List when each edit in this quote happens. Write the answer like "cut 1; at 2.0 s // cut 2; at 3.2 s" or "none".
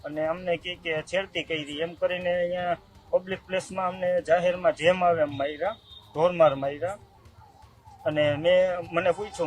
none